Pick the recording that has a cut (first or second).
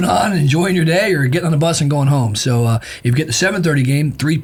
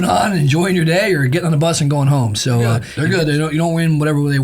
second